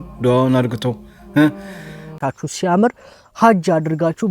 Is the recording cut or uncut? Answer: cut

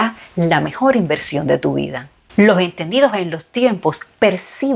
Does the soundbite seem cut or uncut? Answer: cut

